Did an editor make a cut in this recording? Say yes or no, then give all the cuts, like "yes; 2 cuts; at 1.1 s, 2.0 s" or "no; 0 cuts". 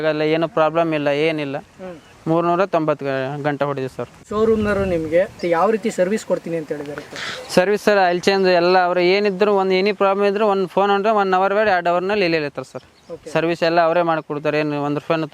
no; 0 cuts